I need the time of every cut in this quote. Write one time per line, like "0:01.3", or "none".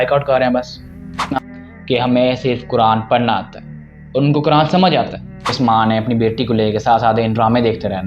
0:01.4
0:05.5